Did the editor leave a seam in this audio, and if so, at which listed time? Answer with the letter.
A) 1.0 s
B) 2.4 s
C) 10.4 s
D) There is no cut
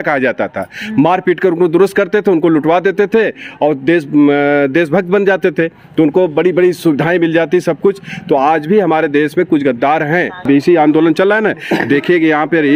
C